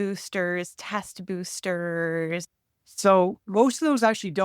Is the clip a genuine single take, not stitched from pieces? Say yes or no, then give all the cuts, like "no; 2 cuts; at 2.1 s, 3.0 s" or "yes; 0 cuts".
no; 2 cuts; at 2.5 s, 3.4 s